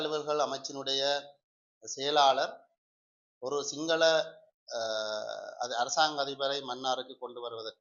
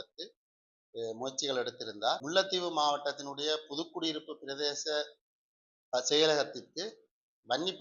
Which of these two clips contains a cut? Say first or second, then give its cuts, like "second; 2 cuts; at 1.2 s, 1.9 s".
second; 1 cut; at 2.2 s